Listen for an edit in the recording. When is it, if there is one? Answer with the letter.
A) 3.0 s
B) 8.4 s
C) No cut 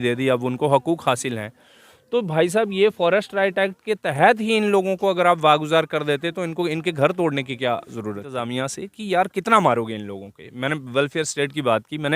B